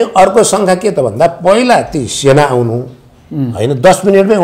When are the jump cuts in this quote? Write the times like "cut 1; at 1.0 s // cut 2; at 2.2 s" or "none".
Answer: none